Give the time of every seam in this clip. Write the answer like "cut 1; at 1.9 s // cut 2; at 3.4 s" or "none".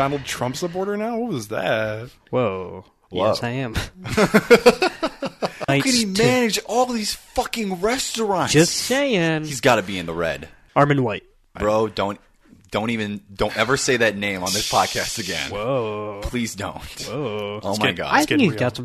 cut 1; at 5.7 s // cut 2; at 10.5 s